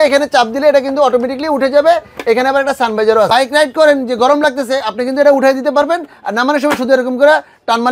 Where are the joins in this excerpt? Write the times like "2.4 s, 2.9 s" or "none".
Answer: 3.3 s